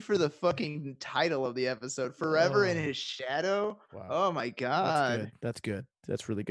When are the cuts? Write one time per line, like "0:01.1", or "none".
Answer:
0:05.2